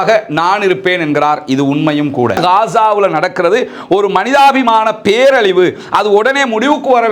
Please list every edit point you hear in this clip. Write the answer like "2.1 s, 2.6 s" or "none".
2.4 s